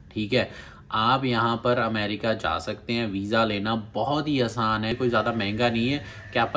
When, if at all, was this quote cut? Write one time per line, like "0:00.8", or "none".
0:04.9